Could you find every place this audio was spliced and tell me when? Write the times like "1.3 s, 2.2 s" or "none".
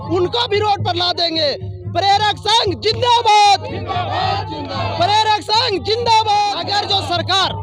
6.6 s